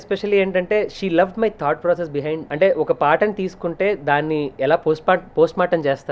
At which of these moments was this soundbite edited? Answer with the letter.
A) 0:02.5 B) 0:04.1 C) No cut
A